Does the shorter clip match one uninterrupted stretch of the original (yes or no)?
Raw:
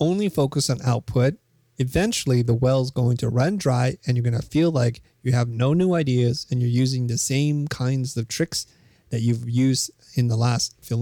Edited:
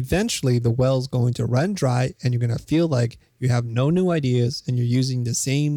yes